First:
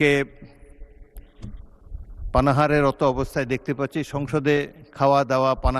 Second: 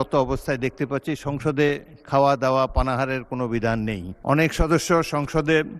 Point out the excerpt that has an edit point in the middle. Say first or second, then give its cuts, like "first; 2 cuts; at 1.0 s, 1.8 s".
second; 1 cut; at 4.1 s